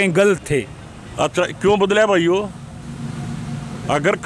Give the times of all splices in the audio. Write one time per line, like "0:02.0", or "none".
none